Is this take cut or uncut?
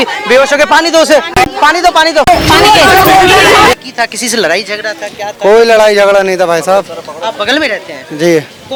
uncut